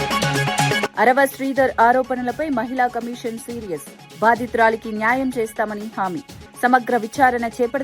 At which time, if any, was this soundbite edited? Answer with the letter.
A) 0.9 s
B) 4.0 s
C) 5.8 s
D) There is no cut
A